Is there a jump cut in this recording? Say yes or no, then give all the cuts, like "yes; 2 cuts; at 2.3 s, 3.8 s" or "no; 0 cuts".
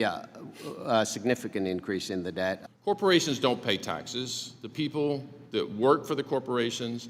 yes; 1 cut; at 2.7 s